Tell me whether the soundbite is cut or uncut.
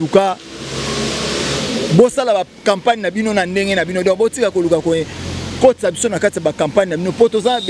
uncut